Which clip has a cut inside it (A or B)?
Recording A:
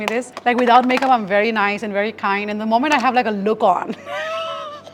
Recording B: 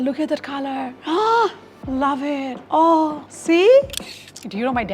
B